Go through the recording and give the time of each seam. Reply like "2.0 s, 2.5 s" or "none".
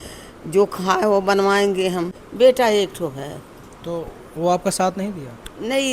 2.2 s